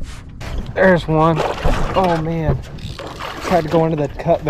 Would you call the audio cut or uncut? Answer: uncut